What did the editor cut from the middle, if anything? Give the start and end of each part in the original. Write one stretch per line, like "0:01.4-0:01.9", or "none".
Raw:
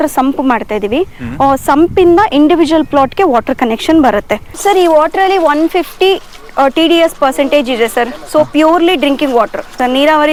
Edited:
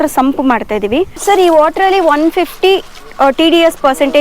0:01.1-0:04.5